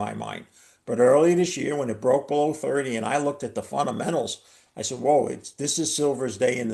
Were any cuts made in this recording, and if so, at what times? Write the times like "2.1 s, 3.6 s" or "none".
none